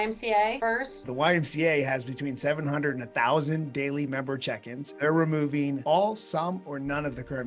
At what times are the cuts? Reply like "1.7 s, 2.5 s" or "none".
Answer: 1.0 s, 3.0 s, 4.9 s